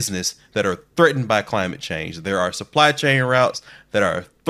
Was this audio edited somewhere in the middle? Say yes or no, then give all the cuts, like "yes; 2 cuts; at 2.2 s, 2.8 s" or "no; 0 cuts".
no; 0 cuts